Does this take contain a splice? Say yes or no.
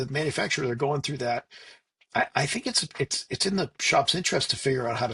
no